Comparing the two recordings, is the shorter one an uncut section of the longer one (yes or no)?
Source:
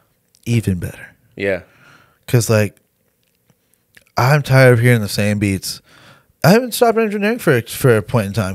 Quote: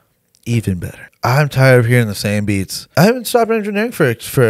no